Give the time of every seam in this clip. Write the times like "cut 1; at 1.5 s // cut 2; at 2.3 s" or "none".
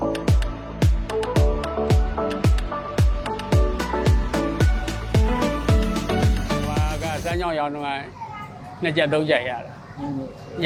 none

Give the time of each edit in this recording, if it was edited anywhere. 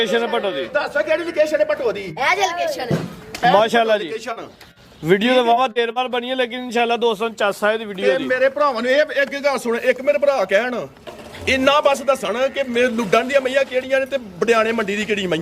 none

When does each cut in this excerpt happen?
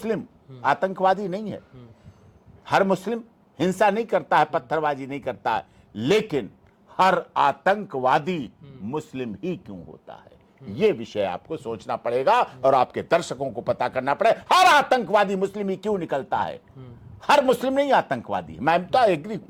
none

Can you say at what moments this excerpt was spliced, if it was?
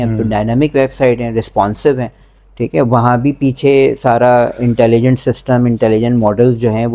none

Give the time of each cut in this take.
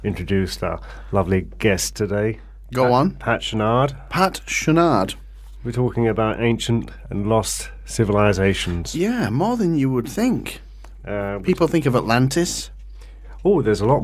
cut 1; at 12.7 s

